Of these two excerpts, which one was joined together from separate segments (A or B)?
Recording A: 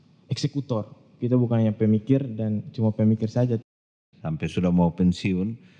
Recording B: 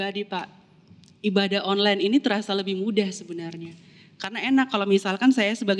A